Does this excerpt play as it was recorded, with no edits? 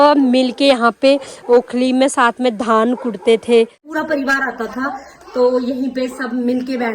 no; 1 cut; at 3.8 s

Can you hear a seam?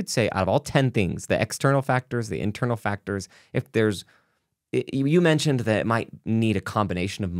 no; 0 cuts

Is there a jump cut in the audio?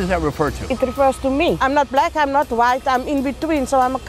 yes; 1 cut; at 1.6 s

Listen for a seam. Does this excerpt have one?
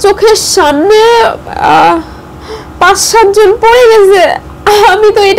no; 0 cuts

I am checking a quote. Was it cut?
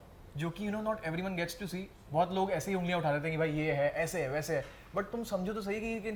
no; 0 cuts

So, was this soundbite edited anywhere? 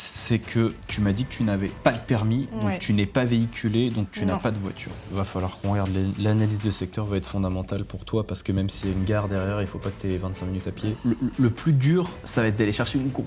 yes; 2 cuts; at 5.0 s, 11.0 s

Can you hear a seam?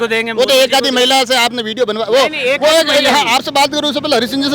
no; 0 cuts

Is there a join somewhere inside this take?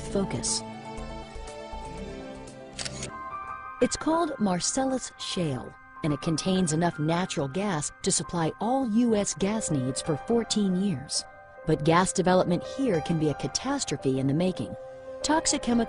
yes; 1 cut; at 11.8 s

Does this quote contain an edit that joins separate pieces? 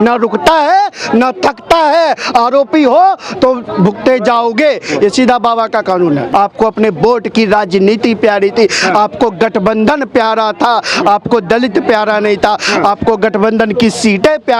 yes; 1 cut; at 6.3 s

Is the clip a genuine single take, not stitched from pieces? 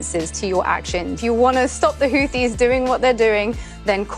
no; 1 cut; at 1.2 s

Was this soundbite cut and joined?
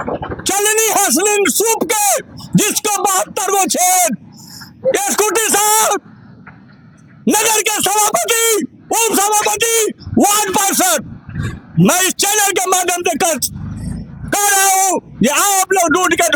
no; 0 cuts

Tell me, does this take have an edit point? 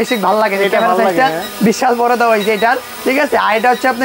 no; 0 cuts

